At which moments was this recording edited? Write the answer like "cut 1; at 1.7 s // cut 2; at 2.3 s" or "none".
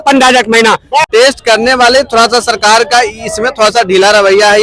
cut 1; at 1.1 s